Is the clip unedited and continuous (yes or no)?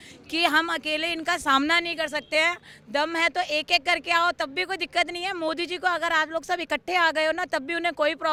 yes